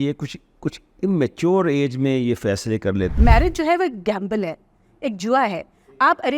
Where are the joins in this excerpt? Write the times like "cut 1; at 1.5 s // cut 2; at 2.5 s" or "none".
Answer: cut 1; at 3.2 s